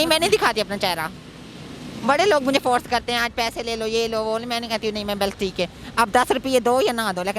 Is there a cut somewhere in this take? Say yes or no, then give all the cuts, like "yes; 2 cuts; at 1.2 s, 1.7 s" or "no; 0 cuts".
no; 0 cuts